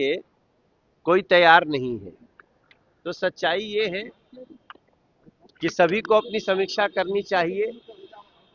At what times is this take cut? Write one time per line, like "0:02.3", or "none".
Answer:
none